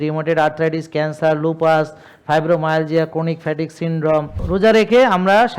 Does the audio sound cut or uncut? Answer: cut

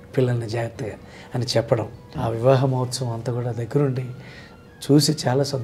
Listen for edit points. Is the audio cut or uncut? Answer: cut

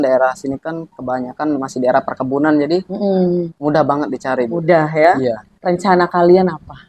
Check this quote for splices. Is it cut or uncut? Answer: cut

